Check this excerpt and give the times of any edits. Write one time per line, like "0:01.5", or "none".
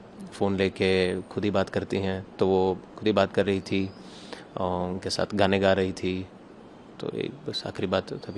none